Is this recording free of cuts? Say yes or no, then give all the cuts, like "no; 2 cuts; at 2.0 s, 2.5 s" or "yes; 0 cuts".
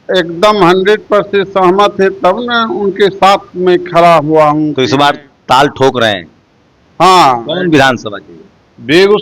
no; 1 cut; at 4.8 s